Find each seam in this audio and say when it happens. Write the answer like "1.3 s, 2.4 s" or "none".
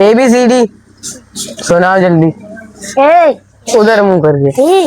none